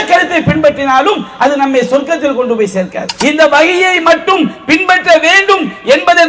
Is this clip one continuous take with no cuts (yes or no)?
no